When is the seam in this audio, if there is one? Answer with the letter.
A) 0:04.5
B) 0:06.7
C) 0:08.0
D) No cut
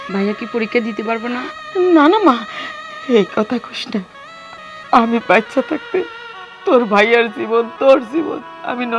D